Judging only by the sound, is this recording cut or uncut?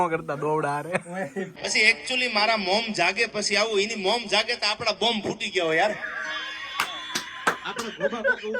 cut